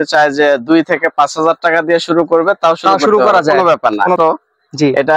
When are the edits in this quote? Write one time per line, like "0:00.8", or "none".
0:04.2